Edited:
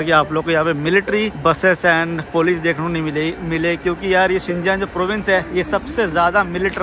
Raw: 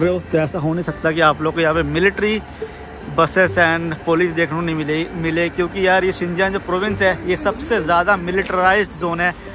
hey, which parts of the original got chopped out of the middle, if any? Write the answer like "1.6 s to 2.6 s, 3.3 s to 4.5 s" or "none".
2.4 s to 3.1 s